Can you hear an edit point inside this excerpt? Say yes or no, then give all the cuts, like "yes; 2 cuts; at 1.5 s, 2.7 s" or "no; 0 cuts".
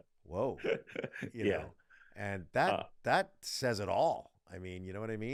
no; 0 cuts